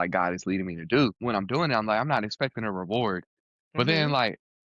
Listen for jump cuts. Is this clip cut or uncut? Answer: cut